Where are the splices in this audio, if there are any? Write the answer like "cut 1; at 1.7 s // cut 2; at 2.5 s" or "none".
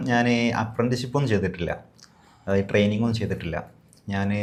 none